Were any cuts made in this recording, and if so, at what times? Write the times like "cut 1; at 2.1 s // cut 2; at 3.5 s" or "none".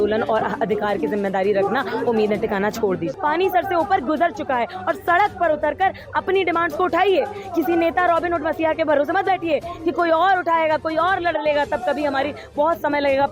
cut 1; at 3.1 s